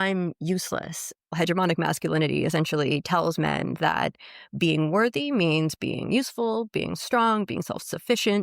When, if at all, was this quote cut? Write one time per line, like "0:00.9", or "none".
0:01.2